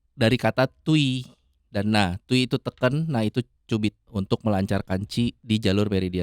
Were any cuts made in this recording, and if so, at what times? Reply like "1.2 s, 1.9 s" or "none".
4.0 s, 5.4 s